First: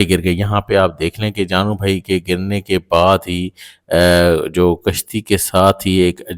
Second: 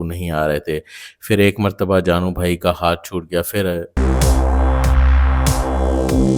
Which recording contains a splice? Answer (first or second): second